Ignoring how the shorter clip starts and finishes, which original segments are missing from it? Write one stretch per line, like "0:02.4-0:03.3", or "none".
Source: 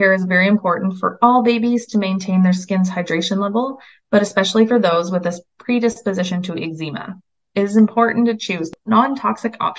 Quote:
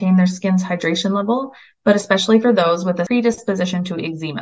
0:05.3-0:05.6